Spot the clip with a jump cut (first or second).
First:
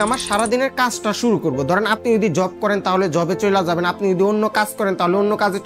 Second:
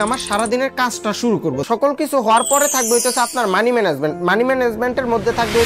second